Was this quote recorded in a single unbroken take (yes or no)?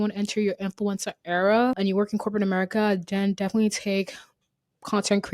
no